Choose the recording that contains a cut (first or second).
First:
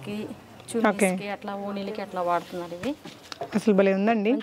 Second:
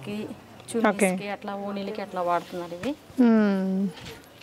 first